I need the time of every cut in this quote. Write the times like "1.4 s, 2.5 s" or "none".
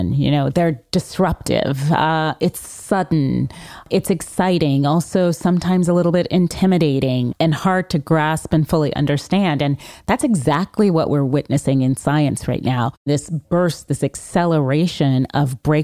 3.8 s, 7.3 s, 13.1 s